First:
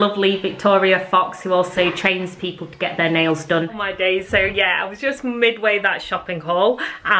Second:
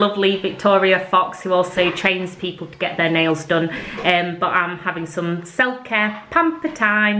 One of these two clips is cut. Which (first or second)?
first